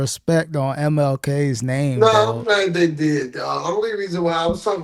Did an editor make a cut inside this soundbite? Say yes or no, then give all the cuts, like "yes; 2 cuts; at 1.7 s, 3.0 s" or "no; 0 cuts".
no; 0 cuts